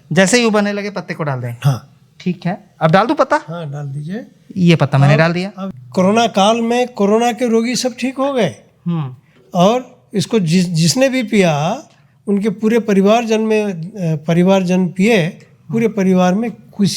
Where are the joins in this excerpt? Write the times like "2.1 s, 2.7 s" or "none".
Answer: 5.7 s